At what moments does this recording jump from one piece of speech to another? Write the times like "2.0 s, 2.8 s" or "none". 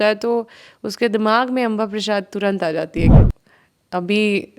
3.1 s